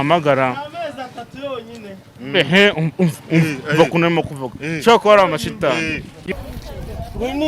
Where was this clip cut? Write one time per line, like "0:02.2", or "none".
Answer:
0:06.3

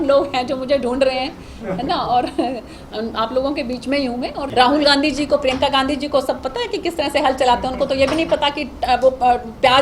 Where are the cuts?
0:04.5

